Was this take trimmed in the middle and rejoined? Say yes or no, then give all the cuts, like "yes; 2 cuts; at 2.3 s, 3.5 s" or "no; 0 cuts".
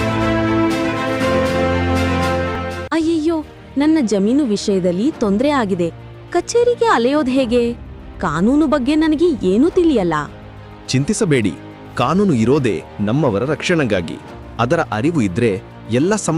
no; 0 cuts